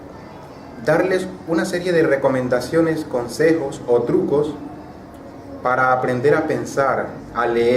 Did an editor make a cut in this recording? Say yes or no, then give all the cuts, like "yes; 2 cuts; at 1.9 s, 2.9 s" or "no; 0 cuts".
yes; 1 cut; at 5.8 s